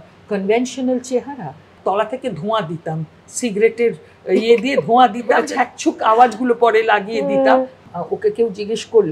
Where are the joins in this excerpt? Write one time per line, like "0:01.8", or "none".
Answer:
0:01.7
0:05.4
0:07.8